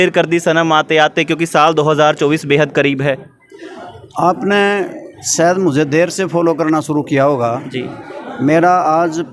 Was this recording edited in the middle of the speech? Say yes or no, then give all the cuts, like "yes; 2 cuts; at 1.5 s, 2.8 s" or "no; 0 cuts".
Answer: no; 0 cuts